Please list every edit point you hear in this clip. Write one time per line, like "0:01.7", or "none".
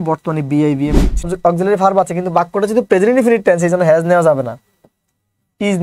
0:01.3

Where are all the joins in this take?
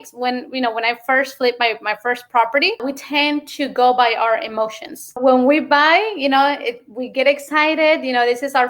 0:02.8
0:05.2

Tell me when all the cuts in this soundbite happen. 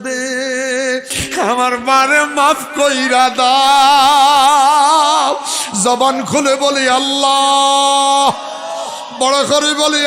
0:01.2

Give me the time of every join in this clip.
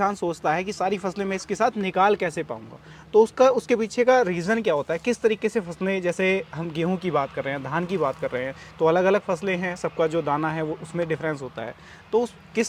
none

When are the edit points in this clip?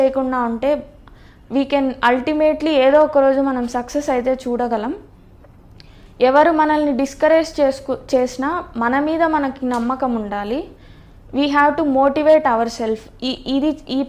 none

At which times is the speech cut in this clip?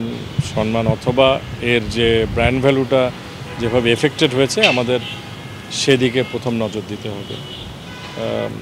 none

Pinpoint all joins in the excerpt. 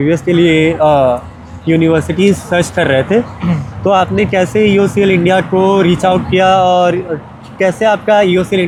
none

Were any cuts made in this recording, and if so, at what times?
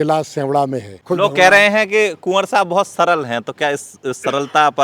0:00.9

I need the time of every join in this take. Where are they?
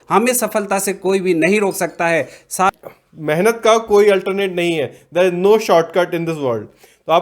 0:02.7

